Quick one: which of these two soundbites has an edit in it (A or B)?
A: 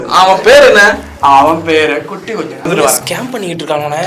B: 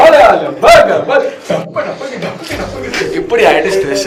A